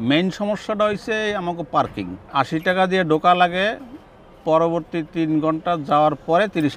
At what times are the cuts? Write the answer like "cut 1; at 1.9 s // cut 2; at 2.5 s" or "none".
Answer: cut 1; at 2.2 s